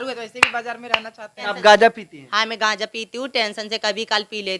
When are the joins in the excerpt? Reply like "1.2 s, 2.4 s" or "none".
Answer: 1.5 s